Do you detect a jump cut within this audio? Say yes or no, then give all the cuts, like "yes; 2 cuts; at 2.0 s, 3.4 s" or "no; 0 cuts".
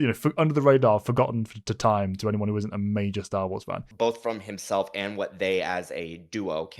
yes; 1 cut; at 3.8 s